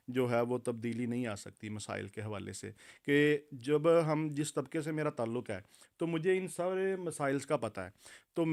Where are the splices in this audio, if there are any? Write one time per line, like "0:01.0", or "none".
none